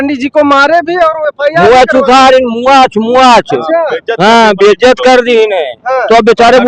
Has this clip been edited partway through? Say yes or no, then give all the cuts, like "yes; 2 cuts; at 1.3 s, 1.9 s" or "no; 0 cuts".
no; 0 cuts